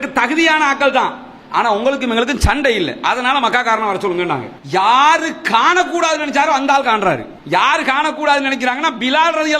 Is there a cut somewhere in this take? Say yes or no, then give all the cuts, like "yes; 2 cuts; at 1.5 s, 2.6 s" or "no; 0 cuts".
yes; 1 cut; at 4.5 s